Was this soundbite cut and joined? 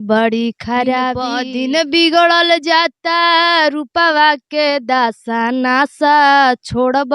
yes; 1 cut; at 1.4 s

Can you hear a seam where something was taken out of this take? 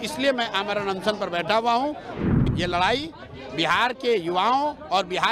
yes; 1 cut; at 2.1 s

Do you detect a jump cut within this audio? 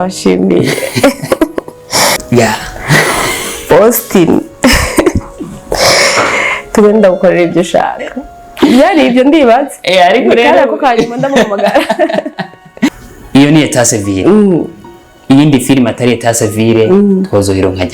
yes; 2 cuts; at 2.1 s, 12.9 s

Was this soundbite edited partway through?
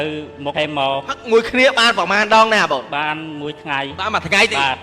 yes; 1 cut; at 1.1 s

